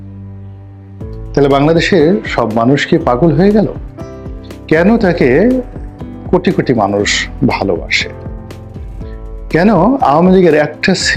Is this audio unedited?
yes; 0 cuts

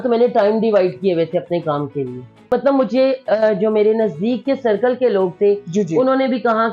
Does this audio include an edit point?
yes; 1 cut; at 2.4 s

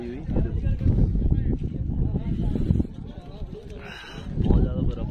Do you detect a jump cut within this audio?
no; 0 cuts

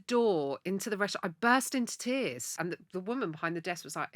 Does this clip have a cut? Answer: yes; 1 cut; at 2.5 s

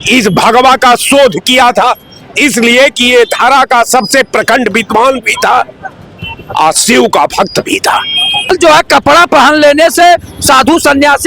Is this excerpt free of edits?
no; 1 cut; at 8.5 s

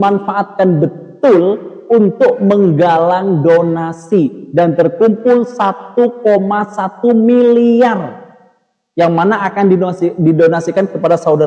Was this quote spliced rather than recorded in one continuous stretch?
no; 0 cuts

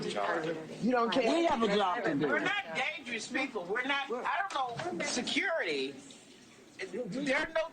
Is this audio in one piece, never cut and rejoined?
no; 1 cut; at 4.8 s

